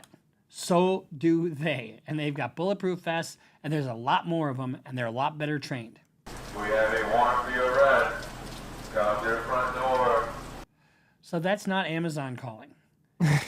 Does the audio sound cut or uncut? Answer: cut